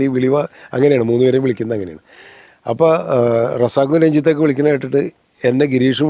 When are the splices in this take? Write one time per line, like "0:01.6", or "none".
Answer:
none